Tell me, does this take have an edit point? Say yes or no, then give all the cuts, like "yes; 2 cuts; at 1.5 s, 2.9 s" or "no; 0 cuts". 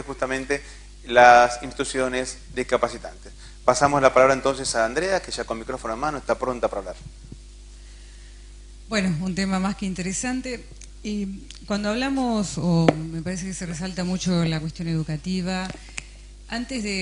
no; 0 cuts